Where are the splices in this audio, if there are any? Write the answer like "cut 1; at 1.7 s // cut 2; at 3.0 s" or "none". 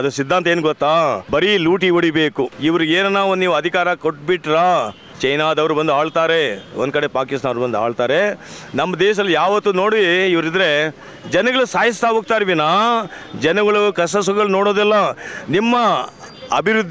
cut 1; at 1.2 s // cut 2; at 2.5 s // cut 3; at 5.0 s // cut 4; at 15.3 s